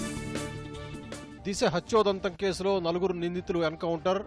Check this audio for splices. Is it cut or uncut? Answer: uncut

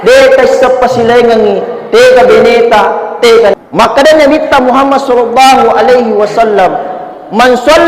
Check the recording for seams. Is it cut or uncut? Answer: cut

